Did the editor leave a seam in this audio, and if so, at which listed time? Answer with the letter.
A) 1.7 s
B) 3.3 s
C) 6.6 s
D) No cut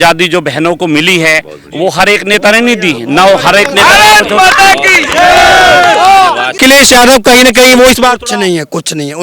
C